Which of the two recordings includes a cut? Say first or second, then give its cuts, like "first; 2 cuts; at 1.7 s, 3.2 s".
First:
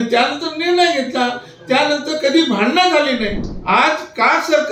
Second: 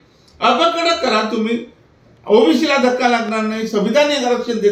first; 1 cut; at 3.5 s